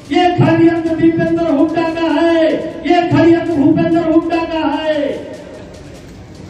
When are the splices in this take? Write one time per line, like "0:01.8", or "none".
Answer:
none